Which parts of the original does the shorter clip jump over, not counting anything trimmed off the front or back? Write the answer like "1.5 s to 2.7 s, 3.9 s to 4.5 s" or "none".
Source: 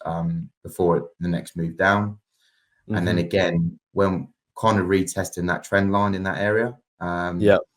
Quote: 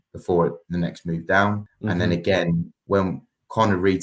2.2 s to 2.8 s